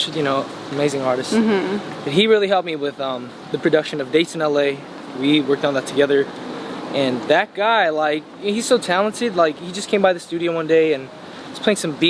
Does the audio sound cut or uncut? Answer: uncut